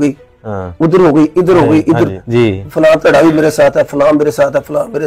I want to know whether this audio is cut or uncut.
cut